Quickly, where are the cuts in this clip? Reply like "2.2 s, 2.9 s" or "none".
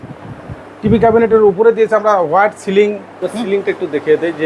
3.3 s